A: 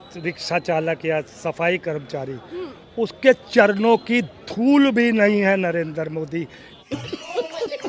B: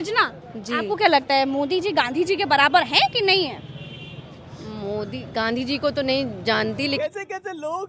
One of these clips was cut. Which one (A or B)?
A